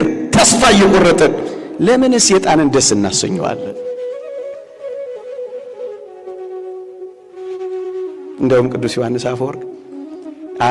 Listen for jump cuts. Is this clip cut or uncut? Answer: uncut